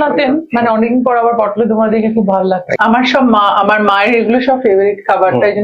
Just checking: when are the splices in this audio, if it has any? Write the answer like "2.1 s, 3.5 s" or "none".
2.7 s